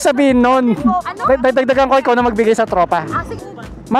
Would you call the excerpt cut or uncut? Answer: cut